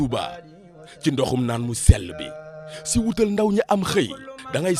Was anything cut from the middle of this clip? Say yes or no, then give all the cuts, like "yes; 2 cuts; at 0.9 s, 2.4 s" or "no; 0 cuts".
no; 0 cuts